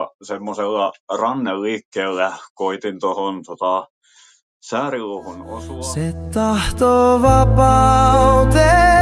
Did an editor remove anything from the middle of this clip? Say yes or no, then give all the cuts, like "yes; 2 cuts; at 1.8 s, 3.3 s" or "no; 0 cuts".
yes; 1 cut; at 5.7 s